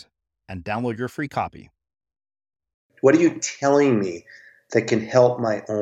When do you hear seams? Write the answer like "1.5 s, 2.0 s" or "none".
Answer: 2.9 s